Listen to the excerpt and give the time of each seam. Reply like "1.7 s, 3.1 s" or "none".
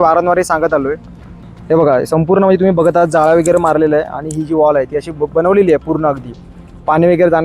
1.3 s